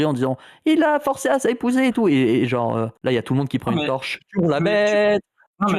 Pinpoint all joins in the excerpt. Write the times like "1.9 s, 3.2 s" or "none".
2.9 s